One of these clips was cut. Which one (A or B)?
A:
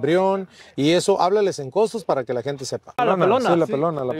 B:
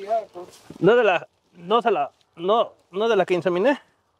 A